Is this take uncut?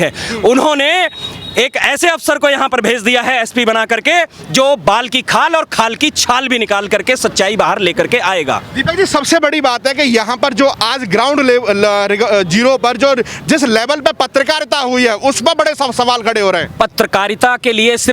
yes; 0 cuts

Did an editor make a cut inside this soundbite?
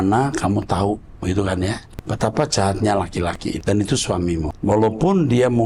yes; 3 cuts; at 1.9 s, 3.6 s, 4.5 s

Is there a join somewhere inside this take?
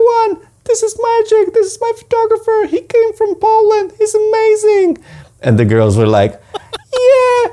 no; 0 cuts

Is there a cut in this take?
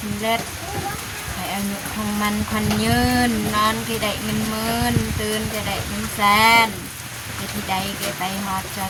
no; 0 cuts

